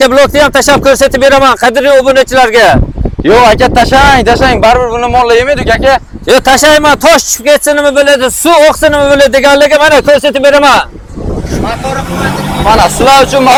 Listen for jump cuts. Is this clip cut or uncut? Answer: uncut